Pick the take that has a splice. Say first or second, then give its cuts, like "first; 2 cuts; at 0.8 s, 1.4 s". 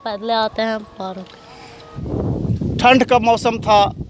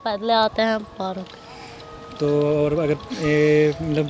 first; 1 cut; at 1.9 s